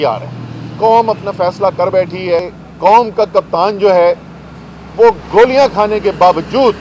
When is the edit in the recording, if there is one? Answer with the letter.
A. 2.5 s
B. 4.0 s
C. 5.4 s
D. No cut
A